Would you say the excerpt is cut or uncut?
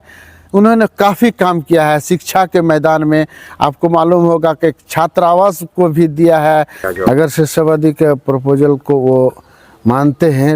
cut